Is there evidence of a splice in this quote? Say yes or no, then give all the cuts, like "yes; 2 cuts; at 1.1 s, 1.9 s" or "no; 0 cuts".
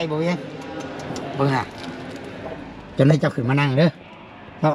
no; 0 cuts